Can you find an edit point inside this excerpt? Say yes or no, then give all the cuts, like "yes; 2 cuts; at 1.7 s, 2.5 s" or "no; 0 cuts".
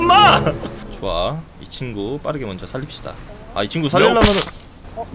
yes; 1 cut; at 1.0 s